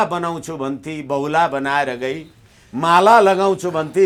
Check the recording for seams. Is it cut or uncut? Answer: uncut